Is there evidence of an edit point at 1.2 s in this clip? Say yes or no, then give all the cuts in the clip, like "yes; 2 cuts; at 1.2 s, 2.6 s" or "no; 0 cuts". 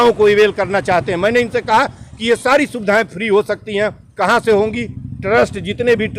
no; 0 cuts